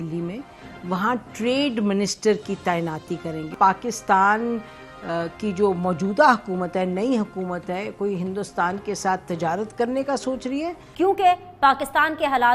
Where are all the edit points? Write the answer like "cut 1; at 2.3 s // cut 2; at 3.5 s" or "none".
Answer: cut 1; at 3.5 s // cut 2; at 10.8 s